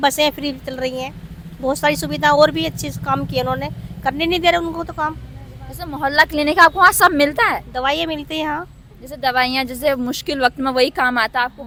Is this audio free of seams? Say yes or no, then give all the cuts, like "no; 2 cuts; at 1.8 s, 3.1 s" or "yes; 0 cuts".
yes; 0 cuts